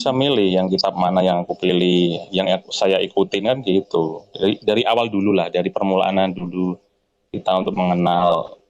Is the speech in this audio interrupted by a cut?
no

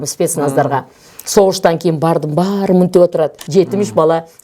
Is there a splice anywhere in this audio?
yes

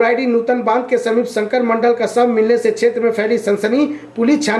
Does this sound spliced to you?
no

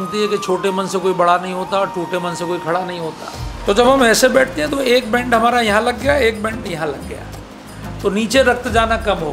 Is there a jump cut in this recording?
yes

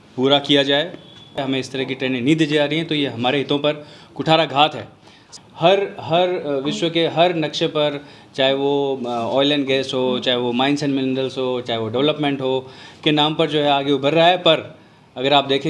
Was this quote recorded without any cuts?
no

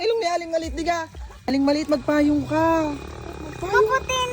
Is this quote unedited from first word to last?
no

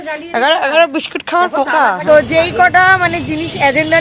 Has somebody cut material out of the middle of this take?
yes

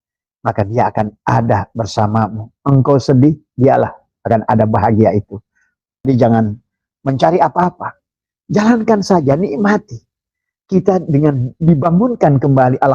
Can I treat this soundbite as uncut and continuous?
no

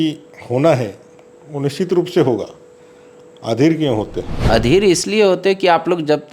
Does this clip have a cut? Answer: yes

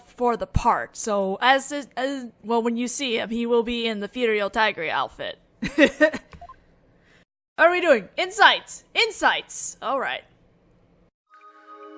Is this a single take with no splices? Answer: yes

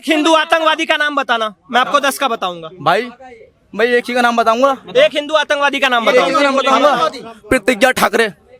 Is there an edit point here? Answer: no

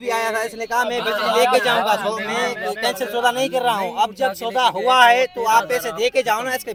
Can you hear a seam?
no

